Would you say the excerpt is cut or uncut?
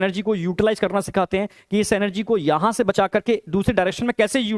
uncut